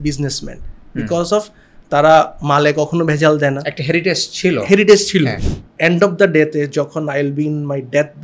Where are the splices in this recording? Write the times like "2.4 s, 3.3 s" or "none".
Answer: 5.4 s